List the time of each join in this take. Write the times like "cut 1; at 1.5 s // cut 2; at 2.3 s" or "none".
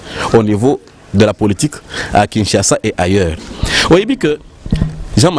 none